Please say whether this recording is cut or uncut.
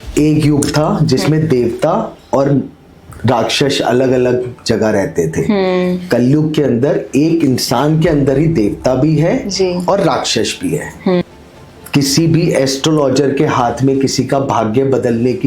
cut